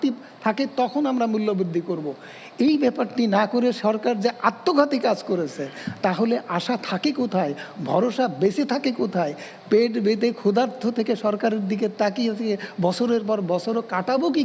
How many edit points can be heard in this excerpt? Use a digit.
0